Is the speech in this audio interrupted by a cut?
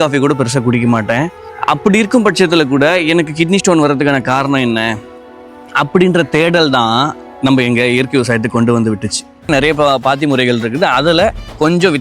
yes; 2 cuts; at 1.4 s, 9.5 s

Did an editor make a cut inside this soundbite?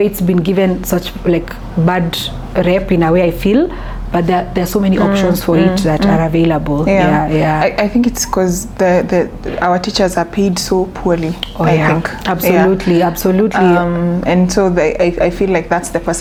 no; 0 cuts

